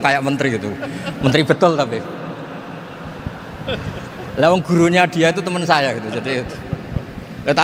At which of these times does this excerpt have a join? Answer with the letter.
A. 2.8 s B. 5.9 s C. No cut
C